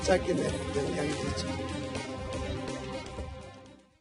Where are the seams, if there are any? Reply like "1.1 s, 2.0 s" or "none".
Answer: 1.6 s

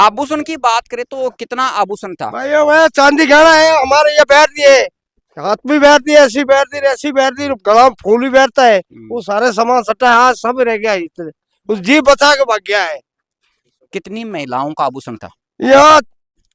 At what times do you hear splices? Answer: none

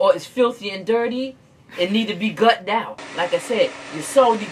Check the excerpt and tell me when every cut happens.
none

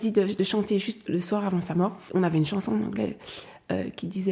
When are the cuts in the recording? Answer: 1.0 s, 2.0 s

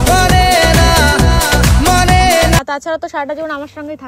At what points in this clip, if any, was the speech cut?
2.6 s

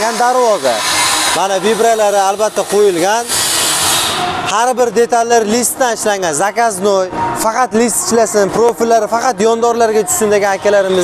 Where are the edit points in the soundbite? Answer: none

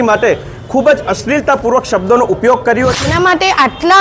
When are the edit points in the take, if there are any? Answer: 3.0 s

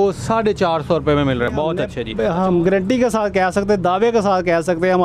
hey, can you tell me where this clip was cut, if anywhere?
1.7 s

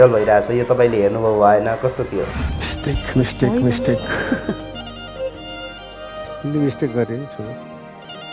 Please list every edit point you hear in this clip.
2.5 s

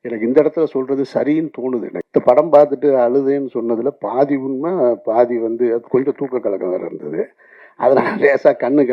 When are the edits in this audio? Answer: 2.0 s

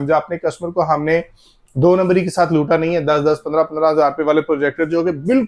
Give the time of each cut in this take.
none

